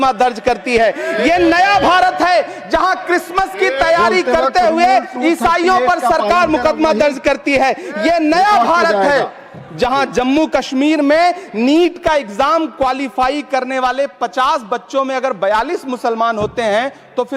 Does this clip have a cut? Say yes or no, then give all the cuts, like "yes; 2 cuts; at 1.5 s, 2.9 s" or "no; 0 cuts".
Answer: no; 0 cuts